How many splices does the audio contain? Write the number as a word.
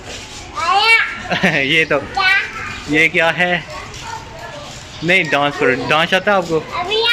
zero